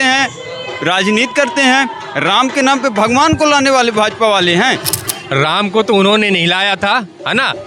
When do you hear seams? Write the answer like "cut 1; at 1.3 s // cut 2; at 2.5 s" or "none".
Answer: cut 1; at 5.1 s